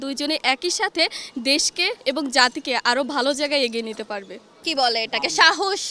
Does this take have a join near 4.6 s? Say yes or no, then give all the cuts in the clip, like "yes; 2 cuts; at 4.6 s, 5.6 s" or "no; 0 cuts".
yes; 1 cut; at 4.6 s